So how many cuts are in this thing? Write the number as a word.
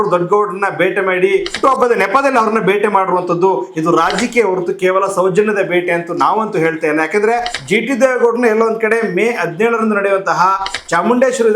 two